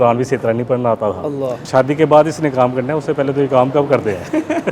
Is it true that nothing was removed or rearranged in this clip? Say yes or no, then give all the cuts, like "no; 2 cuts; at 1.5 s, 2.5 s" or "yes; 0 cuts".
no; 1 cut; at 1.5 s